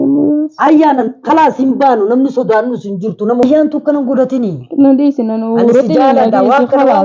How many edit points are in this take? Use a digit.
1